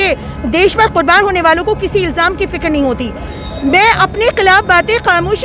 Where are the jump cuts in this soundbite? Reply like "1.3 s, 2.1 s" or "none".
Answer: none